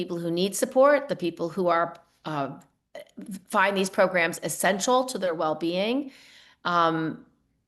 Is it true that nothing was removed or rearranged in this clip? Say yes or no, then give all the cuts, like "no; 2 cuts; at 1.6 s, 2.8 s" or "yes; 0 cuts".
yes; 0 cuts